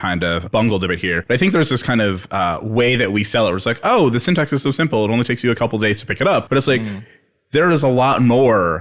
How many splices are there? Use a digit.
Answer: 2